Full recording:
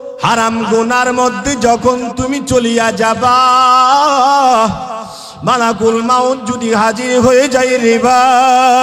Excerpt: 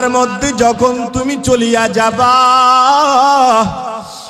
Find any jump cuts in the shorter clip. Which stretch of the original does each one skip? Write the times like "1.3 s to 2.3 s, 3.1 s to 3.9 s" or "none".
none